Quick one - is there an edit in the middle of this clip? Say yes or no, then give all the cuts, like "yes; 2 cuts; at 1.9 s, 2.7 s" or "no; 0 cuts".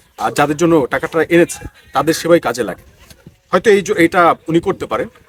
no; 0 cuts